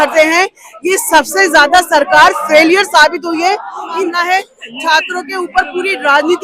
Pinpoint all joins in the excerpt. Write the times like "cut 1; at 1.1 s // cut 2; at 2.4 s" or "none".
cut 1; at 4.1 s